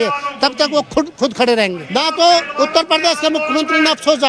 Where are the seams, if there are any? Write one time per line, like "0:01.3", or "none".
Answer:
0:01.8

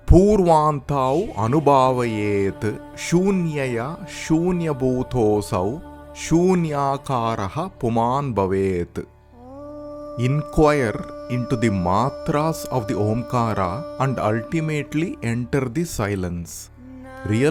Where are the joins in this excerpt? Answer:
none

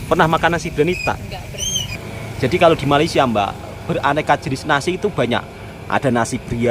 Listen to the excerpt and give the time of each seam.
0:01.9

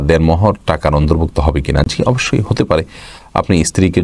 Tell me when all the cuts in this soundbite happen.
none

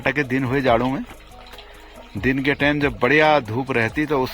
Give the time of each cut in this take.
none

